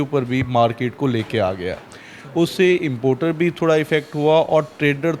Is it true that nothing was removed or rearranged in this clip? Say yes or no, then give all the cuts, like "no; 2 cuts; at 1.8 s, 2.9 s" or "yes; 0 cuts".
yes; 0 cuts